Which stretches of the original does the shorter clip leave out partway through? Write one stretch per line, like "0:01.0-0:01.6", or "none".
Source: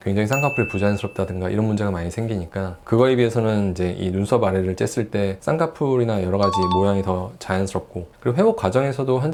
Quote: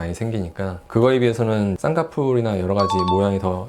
0:03.7-0:05.4